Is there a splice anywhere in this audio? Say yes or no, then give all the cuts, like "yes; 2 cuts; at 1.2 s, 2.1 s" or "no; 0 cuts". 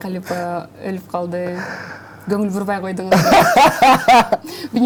no; 0 cuts